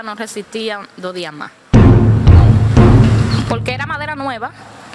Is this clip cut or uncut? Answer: uncut